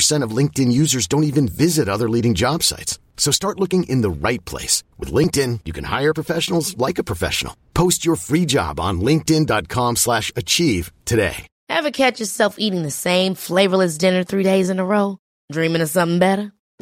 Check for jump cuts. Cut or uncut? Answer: uncut